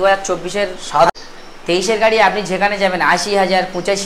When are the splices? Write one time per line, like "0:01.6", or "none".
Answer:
0:01.1